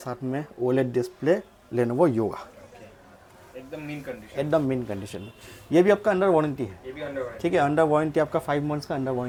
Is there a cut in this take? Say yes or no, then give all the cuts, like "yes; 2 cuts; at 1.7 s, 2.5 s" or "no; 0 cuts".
no; 0 cuts